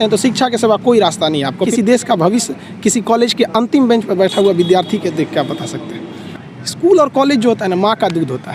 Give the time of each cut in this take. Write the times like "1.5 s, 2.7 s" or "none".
1.7 s, 6.2 s